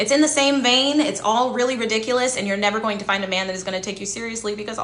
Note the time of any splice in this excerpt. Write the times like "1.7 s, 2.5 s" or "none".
none